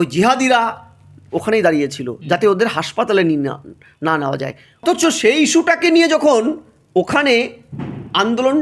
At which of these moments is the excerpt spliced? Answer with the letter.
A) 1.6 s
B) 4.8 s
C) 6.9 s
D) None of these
B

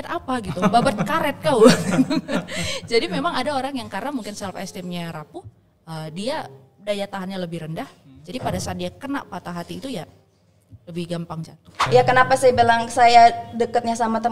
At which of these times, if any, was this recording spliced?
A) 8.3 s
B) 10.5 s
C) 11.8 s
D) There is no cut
C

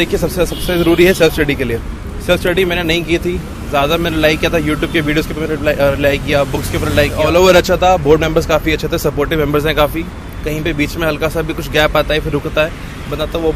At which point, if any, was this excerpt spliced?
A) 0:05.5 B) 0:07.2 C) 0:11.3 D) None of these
B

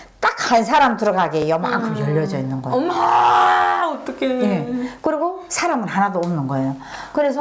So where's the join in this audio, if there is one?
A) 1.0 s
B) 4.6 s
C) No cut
C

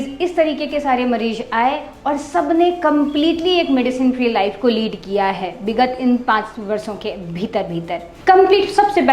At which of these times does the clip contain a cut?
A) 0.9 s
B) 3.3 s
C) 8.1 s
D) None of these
C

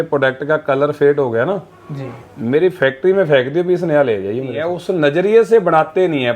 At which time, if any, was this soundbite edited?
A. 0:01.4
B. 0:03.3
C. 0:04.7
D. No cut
C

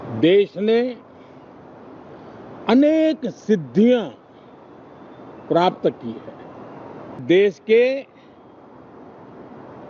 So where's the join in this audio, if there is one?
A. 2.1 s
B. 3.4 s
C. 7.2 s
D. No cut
C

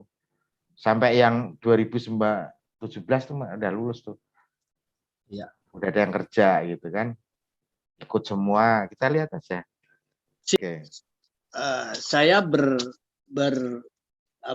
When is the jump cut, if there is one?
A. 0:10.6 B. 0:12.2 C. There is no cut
A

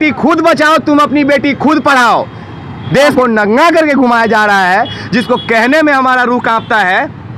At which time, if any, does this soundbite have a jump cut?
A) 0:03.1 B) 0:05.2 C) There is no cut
A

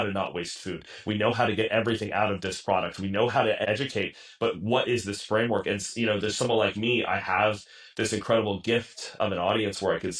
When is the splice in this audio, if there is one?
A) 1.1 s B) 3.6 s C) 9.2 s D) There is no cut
B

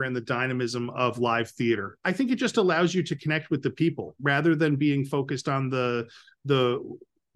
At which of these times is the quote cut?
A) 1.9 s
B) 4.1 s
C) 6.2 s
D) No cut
A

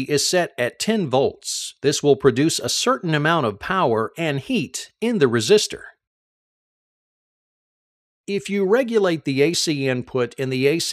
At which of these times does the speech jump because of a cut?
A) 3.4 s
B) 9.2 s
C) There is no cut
C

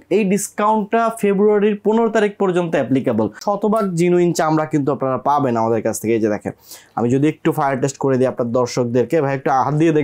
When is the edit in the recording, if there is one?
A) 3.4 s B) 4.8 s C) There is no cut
A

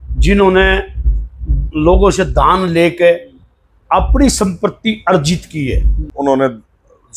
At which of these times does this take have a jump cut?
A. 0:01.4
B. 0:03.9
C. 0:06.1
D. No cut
C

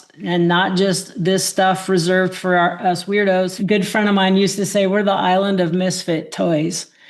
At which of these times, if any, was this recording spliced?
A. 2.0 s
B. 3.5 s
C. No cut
B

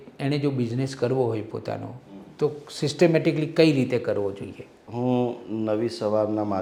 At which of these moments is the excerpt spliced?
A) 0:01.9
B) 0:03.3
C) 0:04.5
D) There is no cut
D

